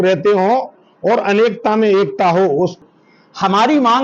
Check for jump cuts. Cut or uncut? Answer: cut